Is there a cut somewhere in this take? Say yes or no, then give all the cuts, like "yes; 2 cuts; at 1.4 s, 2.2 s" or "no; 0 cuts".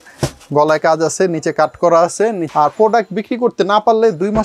yes; 1 cut; at 2.5 s